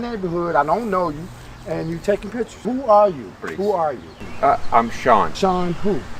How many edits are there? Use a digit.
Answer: 3